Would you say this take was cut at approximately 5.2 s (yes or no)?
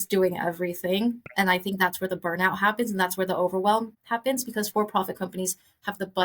no